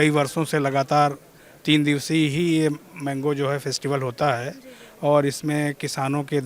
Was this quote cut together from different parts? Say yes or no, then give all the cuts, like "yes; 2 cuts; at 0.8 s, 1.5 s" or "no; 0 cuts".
no; 0 cuts